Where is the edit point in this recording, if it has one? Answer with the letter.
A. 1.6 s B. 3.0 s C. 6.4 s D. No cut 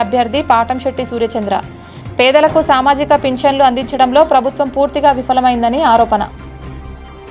C